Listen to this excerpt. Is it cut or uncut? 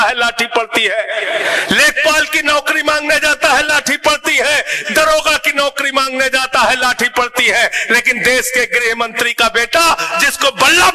uncut